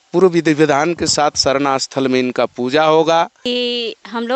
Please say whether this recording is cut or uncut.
cut